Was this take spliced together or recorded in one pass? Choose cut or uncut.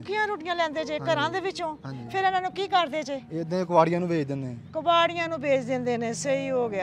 uncut